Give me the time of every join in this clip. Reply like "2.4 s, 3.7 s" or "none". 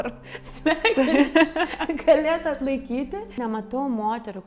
3.4 s